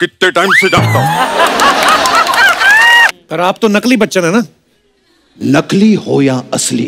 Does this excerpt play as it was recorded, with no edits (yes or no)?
no